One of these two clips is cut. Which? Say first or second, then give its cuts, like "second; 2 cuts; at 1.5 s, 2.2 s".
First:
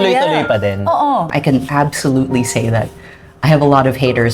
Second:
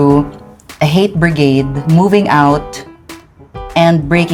first; 1 cut; at 1.3 s